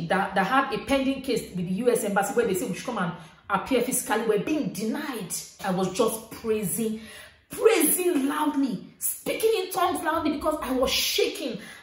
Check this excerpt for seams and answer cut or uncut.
cut